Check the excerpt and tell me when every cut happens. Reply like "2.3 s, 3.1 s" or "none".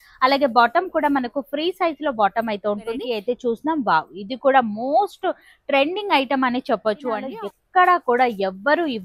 3.1 s, 7.2 s